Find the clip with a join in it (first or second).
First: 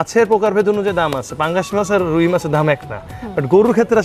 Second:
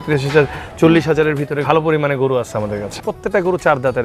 second